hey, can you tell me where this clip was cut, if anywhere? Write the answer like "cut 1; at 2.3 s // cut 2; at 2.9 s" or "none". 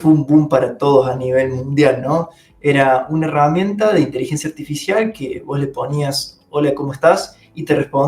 none